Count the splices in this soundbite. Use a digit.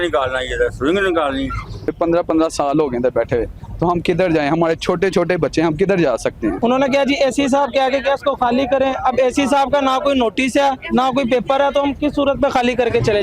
2